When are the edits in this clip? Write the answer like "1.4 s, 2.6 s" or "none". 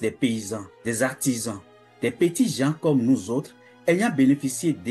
none

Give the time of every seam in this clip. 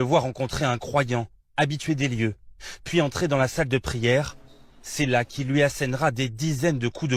none

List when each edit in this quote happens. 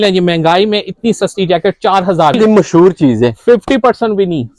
2.4 s

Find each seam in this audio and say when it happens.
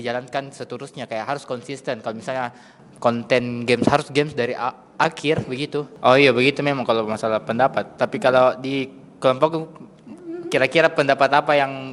5.9 s

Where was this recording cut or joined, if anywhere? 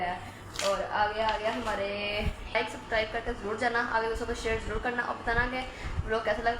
2.6 s

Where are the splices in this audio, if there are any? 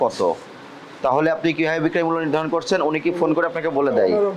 none

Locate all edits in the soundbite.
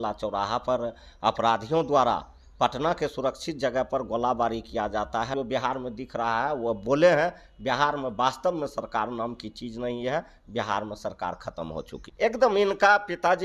5.3 s, 12.0 s

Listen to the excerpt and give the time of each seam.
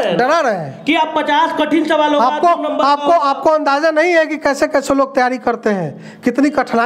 none

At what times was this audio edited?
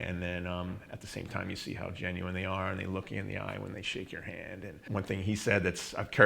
4.8 s

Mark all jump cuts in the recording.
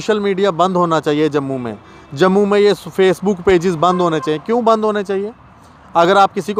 none

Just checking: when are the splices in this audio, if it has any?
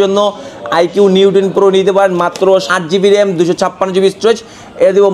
2.7 s

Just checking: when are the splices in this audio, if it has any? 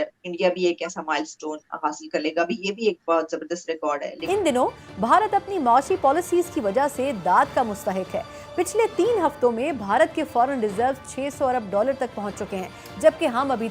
4.1 s

